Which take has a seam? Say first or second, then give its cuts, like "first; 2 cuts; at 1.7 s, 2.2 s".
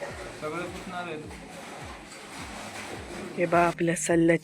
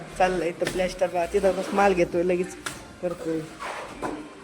first; 1 cut; at 3.4 s